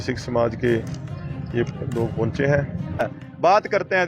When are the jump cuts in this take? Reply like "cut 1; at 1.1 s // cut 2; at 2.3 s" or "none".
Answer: cut 1; at 3.1 s

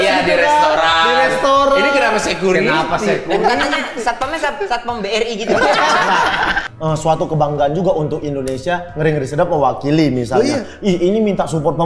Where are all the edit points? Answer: cut 1; at 6.6 s

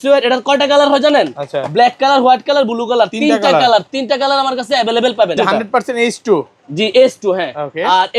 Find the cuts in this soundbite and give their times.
cut 1; at 5.4 s

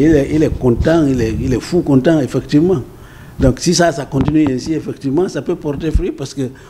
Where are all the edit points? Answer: none

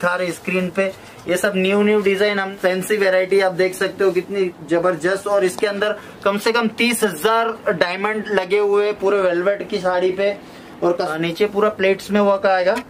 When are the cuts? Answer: cut 1; at 2.5 s // cut 2; at 11.1 s

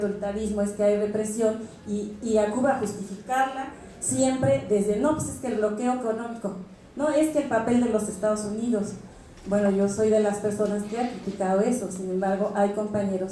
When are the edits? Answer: cut 1; at 10.3 s

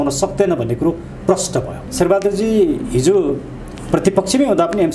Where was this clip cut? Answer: cut 1; at 1.8 s

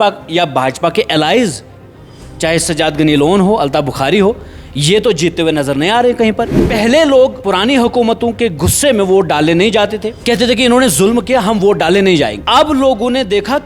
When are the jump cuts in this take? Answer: cut 1; at 6.6 s // cut 2; at 7.4 s // cut 3; at 10.1 s // cut 4; at 12.4 s

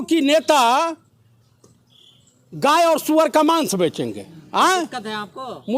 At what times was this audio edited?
none

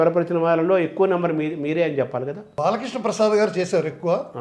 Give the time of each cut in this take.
cut 1; at 2.5 s

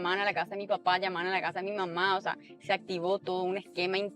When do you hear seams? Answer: none

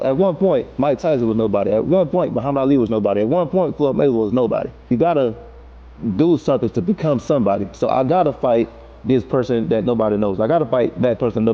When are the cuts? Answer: cut 1; at 4.9 s

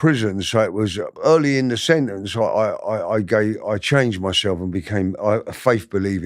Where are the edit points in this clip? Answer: cut 1; at 1.1 s

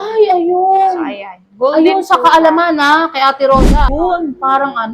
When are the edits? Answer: cut 1; at 3.8 s

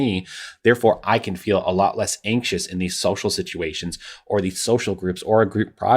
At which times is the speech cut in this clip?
cut 1; at 1.0 s

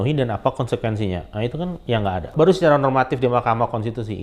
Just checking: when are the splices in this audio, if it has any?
cut 1; at 2.3 s

